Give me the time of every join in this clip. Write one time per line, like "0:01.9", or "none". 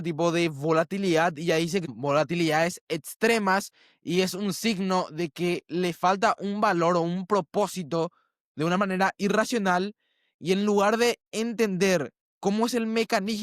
0:01.9